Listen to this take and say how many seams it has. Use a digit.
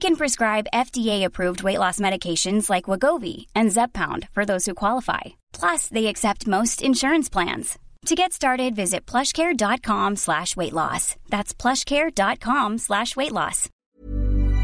1